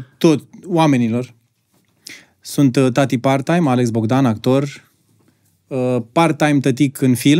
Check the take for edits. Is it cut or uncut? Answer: uncut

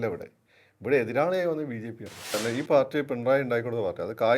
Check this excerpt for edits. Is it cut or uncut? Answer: cut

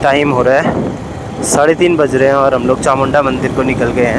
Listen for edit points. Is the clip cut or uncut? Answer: uncut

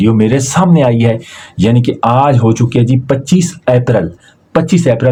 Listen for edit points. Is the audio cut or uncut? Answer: uncut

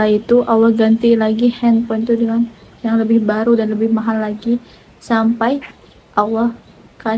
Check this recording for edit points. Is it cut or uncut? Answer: uncut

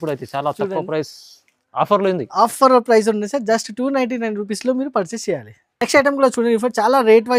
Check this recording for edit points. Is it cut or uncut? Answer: uncut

